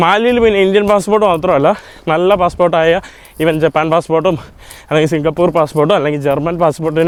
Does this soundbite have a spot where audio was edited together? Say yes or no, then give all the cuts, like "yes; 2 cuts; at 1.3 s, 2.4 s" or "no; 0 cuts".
no; 0 cuts